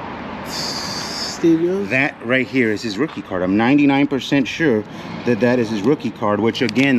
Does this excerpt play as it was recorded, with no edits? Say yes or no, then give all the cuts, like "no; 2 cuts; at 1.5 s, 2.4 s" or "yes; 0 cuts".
yes; 0 cuts